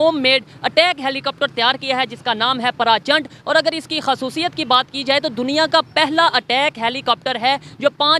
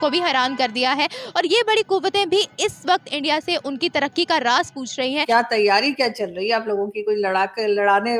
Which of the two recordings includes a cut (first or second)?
second